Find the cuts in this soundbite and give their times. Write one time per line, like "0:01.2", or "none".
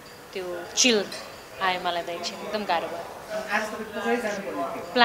none

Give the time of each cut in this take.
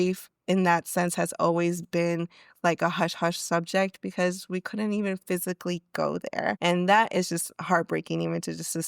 0:06.6

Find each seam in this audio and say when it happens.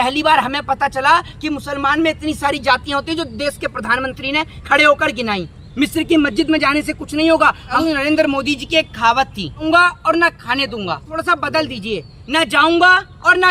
0:05.6
0:07.8
0:09.6
0:11.1

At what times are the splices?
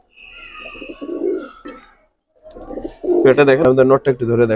0:03.6

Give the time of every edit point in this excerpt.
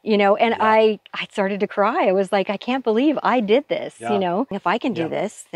0:04.5

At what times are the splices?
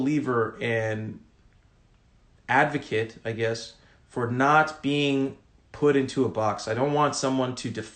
none

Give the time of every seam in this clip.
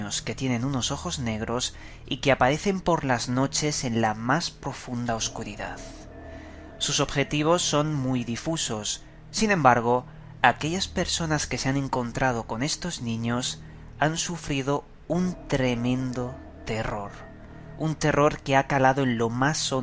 0:07.4

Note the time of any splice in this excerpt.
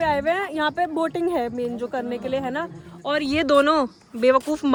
none

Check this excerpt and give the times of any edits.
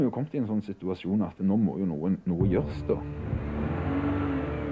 none

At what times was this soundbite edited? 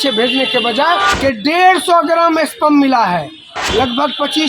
0:01.1
0:03.6

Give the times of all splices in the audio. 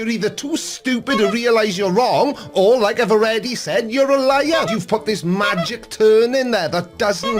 0:04.7

